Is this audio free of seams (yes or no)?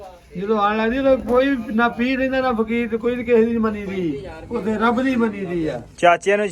yes